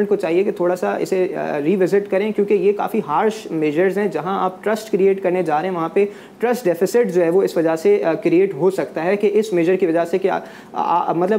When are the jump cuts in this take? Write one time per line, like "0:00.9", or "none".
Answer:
none